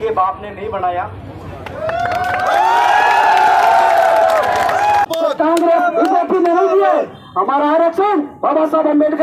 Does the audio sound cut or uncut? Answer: cut